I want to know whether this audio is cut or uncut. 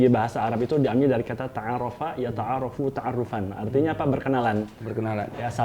uncut